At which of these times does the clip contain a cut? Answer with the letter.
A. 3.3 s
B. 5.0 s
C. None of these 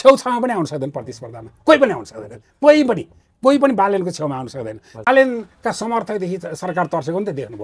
B